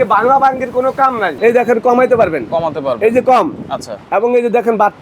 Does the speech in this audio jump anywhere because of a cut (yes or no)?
yes